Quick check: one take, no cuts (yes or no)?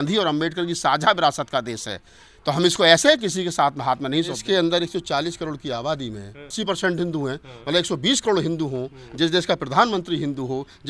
no